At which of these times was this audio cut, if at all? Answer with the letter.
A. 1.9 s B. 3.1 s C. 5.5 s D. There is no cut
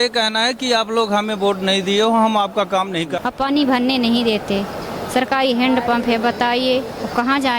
B